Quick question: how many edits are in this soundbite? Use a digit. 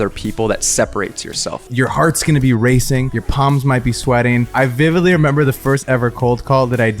3